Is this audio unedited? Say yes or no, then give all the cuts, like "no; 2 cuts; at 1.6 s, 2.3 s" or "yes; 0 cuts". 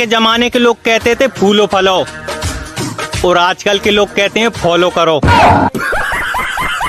no; 1 cut; at 2.1 s